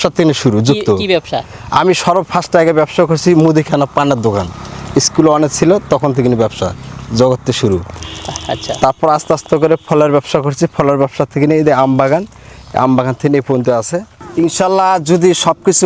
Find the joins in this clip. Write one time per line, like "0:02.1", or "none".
0:14.1